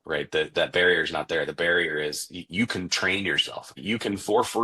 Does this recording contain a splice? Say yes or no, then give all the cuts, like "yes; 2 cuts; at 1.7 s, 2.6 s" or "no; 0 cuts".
yes; 1 cut; at 3.7 s